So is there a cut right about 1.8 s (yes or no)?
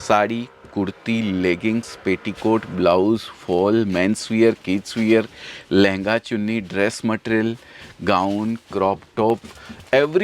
no